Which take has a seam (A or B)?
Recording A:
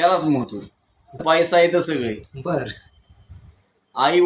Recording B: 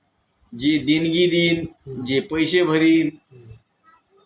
A